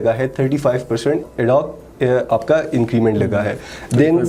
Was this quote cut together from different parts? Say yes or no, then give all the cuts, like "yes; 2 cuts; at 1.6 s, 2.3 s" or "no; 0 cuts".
no; 0 cuts